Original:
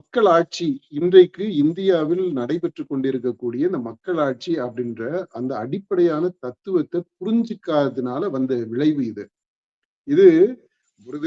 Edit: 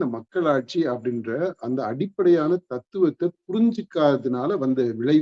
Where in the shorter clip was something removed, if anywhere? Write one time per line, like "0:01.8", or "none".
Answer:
none